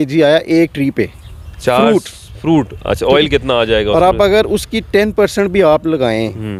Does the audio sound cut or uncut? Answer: uncut